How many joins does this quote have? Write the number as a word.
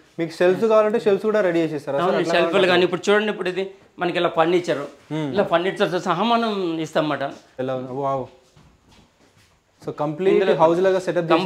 one